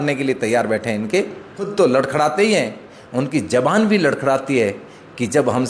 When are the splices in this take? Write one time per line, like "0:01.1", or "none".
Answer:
0:01.6